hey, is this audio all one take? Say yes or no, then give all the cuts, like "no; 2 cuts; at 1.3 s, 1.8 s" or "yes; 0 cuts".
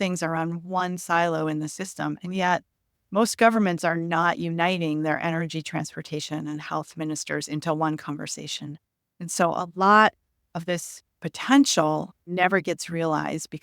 no; 1 cut; at 12.3 s